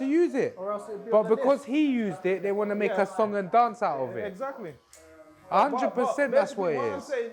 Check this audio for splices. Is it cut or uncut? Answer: uncut